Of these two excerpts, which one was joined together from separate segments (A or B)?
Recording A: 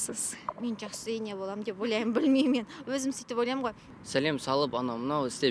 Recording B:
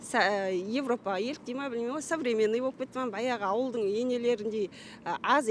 A